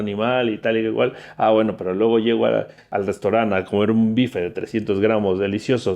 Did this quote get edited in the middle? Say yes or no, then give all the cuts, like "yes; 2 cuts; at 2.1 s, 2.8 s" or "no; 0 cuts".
yes; 1 cut; at 2.9 s